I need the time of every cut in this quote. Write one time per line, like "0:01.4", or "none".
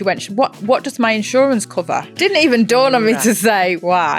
0:02.1
0:03.2